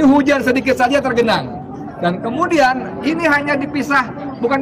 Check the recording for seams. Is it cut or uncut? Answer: uncut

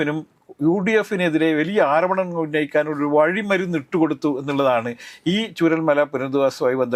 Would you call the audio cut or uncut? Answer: uncut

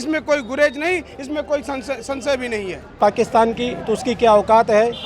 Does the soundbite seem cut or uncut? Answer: cut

